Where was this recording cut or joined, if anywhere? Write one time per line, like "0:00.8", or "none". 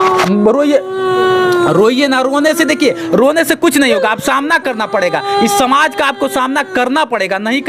none